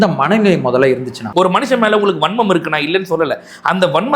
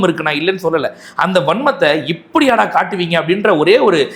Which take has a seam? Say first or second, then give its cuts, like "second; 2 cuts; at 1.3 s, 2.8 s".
first; 1 cut; at 1.2 s